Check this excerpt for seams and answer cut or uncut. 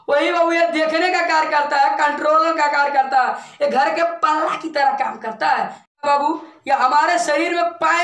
cut